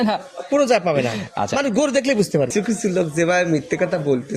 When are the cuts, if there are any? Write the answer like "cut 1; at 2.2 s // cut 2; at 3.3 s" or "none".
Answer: cut 1; at 2.5 s